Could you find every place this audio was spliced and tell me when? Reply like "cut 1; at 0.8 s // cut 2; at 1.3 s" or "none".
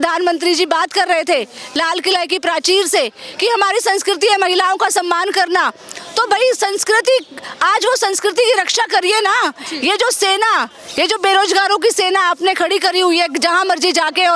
none